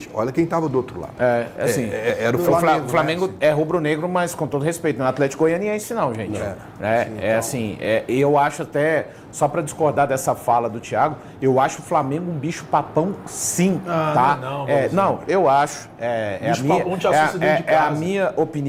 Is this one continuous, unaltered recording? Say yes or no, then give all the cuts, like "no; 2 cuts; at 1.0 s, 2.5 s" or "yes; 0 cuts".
yes; 0 cuts